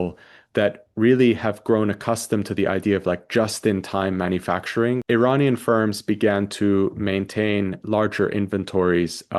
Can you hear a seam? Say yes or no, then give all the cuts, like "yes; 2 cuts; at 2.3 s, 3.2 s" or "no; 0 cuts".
yes; 1 cut; at 5.0 s